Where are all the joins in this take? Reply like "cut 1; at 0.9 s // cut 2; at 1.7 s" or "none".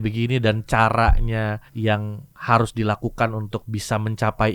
cut 1; at 1.7 s